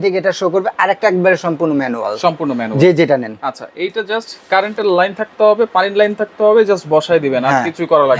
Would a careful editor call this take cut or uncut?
uncut